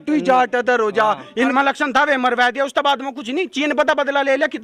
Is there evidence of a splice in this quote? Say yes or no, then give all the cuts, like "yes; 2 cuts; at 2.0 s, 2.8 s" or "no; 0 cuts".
yes; 1 cut; at 1.5 s